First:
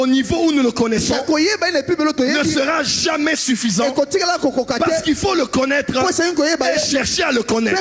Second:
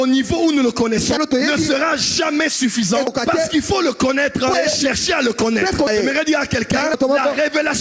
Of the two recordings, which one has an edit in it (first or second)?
second